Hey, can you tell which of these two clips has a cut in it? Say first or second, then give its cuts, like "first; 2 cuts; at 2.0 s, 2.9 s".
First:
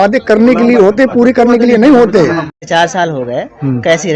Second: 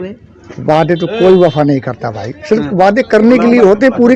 first; 1 cut; at 2.7 s